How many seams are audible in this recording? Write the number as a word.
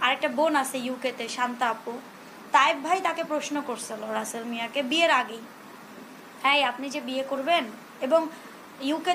one